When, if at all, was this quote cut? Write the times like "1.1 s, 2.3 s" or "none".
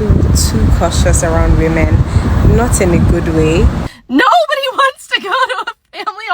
3.9 s